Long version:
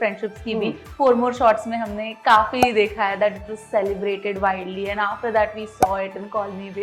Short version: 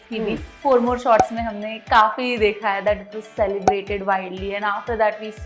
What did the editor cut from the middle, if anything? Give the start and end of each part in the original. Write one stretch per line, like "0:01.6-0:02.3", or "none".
none